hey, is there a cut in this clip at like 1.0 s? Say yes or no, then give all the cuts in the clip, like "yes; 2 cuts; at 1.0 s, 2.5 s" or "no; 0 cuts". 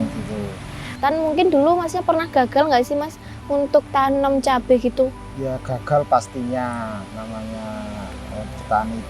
yes; 1 cut; at 1.0 s